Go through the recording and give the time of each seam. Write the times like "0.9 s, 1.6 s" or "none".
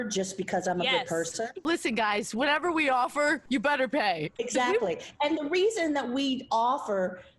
1.6 s, 4.3 s